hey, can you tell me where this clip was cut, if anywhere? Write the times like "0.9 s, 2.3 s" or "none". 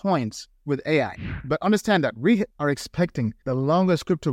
1.3 s